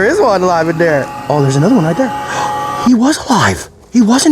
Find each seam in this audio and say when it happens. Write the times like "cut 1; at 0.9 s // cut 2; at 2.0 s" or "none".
cut 1; at 1.2 s